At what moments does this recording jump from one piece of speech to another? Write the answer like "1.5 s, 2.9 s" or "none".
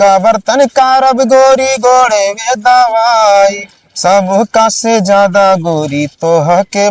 none